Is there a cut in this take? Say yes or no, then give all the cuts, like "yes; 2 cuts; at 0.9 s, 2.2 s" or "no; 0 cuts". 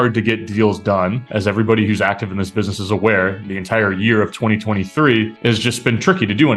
yes; 1 cut; at 5.3 s